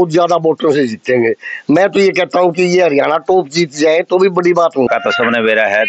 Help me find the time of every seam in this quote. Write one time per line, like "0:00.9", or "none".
0:04.9